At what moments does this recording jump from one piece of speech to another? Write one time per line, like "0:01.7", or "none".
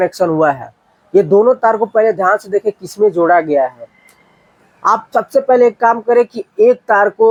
none